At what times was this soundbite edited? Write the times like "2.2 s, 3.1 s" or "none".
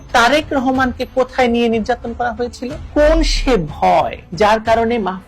2.8 s